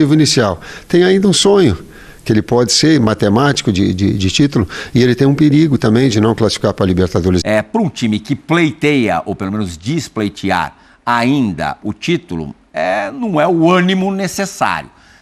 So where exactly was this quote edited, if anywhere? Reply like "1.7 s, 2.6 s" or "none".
7.4 s